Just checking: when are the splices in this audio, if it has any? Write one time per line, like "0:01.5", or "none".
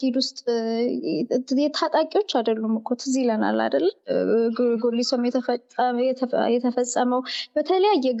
none